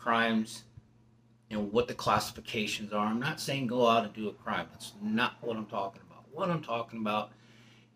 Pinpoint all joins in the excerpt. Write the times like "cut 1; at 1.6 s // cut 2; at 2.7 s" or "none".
none